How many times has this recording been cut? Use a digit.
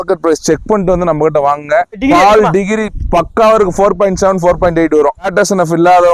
0